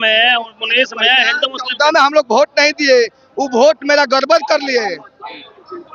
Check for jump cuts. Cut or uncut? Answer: uncut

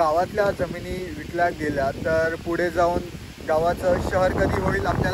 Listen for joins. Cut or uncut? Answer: uncut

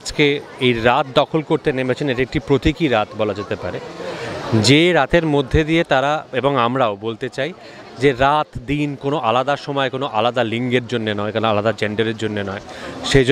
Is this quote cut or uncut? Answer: uncut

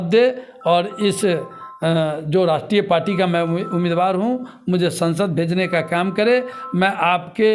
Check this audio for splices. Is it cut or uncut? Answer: uncut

